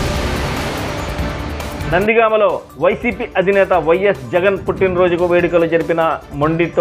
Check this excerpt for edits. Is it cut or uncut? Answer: cut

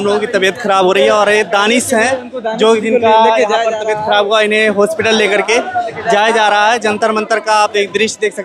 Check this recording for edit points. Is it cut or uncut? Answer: uncut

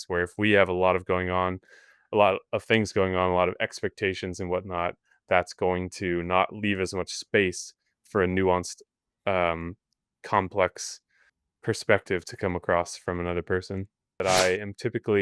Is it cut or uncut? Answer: cut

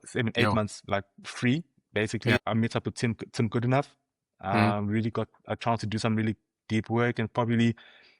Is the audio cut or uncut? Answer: cut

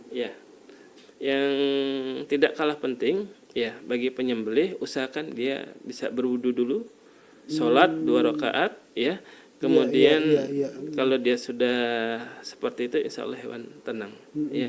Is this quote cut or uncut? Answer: cut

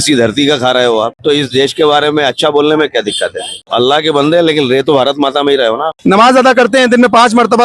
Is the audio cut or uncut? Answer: cut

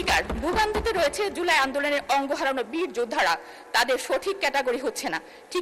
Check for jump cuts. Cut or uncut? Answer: uncut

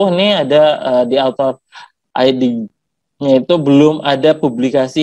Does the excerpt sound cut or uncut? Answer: uncut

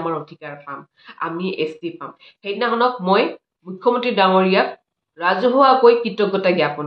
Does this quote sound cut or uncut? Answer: uncut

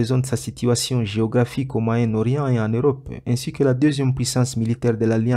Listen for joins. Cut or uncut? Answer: uncut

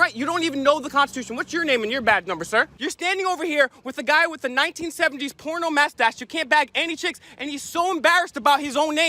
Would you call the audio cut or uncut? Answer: cut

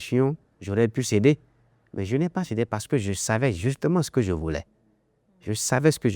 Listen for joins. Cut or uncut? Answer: uncut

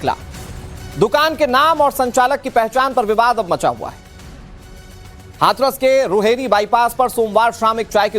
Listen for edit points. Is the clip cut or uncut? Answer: cut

